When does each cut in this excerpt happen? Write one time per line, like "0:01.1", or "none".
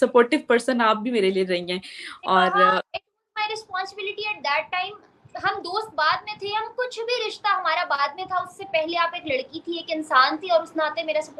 none